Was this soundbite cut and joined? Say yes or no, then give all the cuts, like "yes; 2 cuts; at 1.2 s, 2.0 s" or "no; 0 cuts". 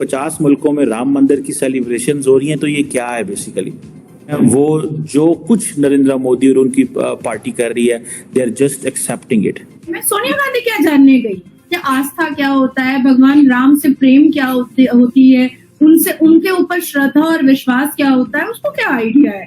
yes; 2 cuts; at 4.3 s, 10.1 s